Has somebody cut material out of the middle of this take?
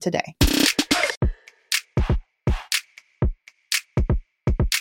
yes; 1 cut; at 1.1 s

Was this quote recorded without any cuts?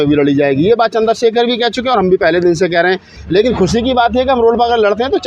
no; 1 cut; at 3.2 s

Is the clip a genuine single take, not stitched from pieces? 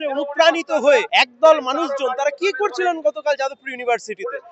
no; 1 cut; at 1.1 s

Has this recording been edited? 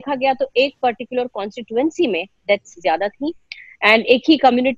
no; 0 cuts

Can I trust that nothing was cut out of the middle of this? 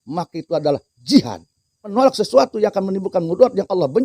no; 1 cut; at 1.9 s

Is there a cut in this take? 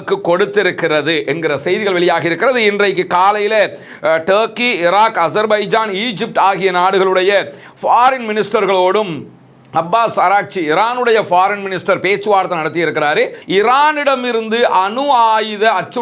yes; 1 cut; at 13.4 s

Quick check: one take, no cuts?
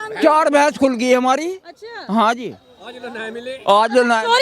yes; 0 cuts

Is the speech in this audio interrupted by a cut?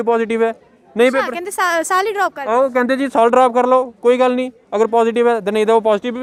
no; 0 cuts

